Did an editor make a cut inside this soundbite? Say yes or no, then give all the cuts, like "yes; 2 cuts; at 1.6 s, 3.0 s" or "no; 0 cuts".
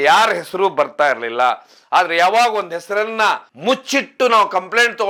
no; 0 cuts